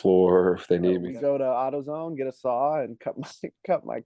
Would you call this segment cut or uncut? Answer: cut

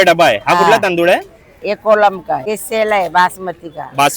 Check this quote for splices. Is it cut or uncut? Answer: cut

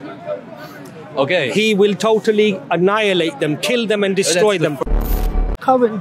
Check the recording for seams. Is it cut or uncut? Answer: cut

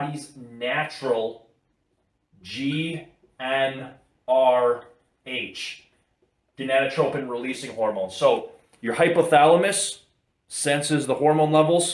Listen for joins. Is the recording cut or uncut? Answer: uncut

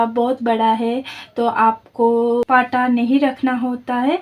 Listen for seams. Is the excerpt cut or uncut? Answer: cut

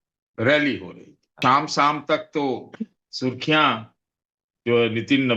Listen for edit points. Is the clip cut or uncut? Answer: cut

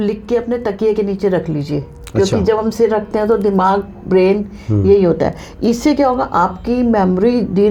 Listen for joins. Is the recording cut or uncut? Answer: uncut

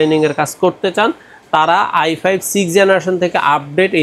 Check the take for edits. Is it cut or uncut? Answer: uncut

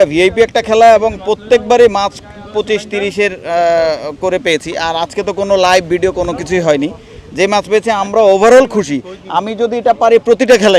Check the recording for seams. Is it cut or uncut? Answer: uncut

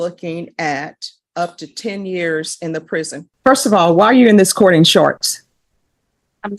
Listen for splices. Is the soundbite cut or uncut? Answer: cut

